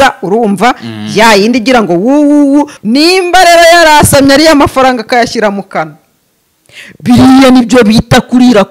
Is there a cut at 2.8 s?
yes; 1 cut; at 2.8 s

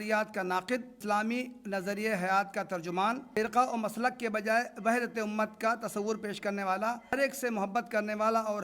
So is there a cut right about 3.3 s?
yes; 3 cuts; at 0.9 s, 3.3 s, 7.1 s

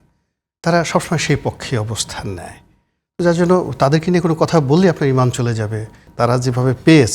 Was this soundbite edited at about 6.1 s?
yes; 1 cut; at 6.1 s

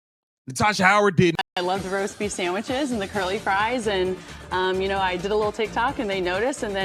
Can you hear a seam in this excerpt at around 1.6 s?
yes; 1 cut; at 1.6 s

